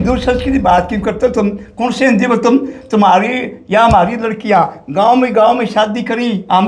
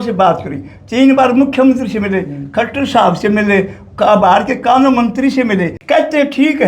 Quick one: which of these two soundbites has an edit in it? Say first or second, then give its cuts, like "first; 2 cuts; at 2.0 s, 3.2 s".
second; 1 cut; at 5.8 s